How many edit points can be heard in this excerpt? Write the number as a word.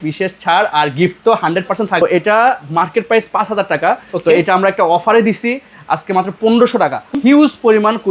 two